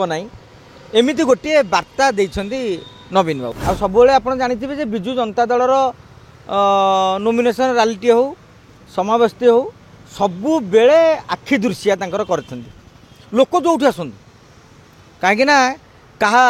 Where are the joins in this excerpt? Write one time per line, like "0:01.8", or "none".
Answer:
0:03.5